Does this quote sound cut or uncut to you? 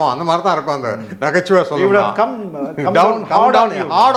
uncut